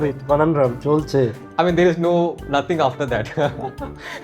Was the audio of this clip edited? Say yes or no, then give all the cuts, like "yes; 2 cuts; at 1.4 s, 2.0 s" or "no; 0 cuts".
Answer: yes; 1 cut; at 1.4 s